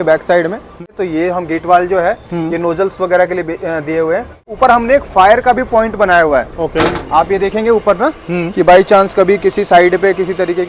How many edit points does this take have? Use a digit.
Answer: 2